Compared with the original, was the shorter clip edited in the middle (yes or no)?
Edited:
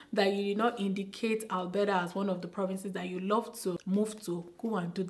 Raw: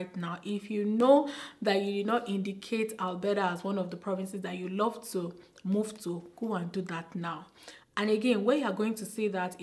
yes